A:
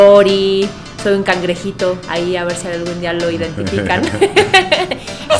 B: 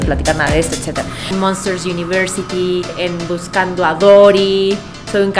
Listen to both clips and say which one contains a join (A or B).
B